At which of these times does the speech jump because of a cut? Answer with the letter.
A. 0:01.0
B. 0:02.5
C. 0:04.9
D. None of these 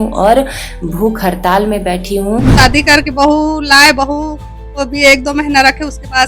B